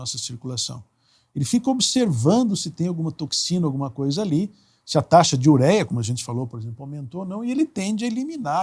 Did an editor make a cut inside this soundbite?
no; 0 cuts

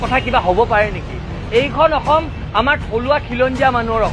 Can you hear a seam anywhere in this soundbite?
no; 0 cuts

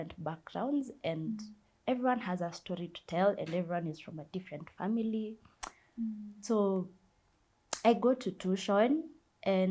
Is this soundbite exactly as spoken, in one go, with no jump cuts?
yes; 0 cuts

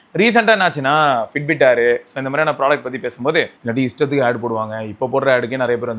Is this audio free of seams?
no; 1 cut; at 3.6 s

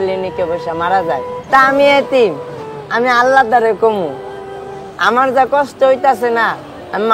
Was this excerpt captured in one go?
no; 1 cut; at 1.3 s

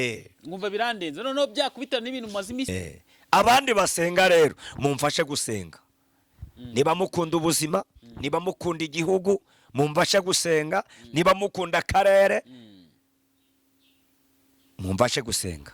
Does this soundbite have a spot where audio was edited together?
yes; 1 cut; at 2.7 s

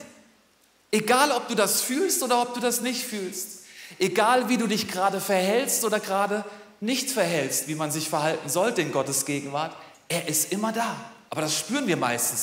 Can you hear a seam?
yes; 1 cut; at 11.2 s

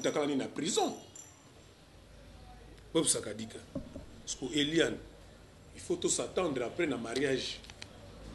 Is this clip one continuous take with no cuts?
no; 1 cut; at 1.6 s

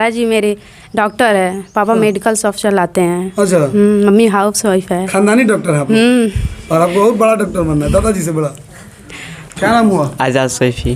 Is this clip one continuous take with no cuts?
yes; 0 cuts

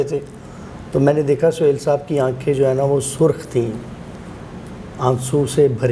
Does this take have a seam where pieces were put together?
no; 0 cuts

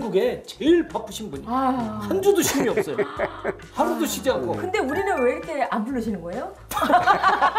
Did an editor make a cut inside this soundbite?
no; 0 cuts

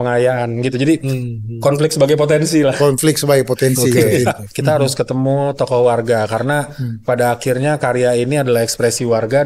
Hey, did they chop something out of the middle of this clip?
yes; 1 cut; at 4.6 s

